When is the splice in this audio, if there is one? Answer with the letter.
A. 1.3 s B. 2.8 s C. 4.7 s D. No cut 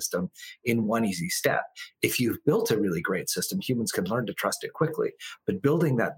D